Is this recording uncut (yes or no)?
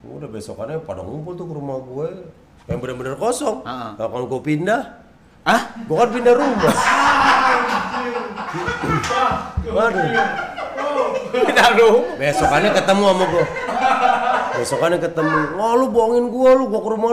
yes